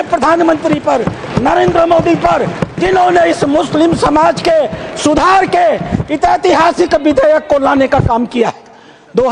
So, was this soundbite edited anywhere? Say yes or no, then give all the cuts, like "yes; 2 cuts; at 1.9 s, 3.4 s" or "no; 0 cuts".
no; 0 cuts